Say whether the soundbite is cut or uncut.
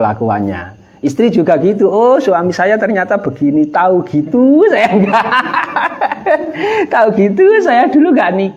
uncut